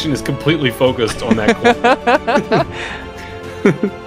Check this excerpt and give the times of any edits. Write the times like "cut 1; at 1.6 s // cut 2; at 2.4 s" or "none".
none